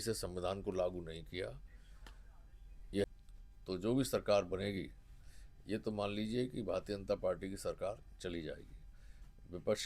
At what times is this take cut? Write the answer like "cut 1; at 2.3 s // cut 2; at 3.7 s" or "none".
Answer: cut 1; at 3.0 s